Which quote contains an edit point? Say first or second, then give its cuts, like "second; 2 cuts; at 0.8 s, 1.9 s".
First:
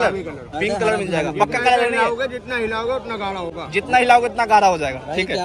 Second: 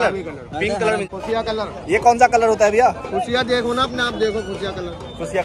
second; 1 cut; at 1.1 s